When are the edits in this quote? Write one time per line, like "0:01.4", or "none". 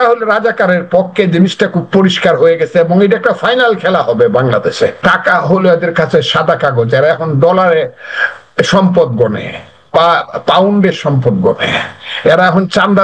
0:05.0